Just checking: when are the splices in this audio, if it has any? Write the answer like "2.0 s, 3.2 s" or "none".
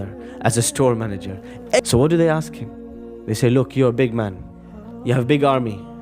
1.8 s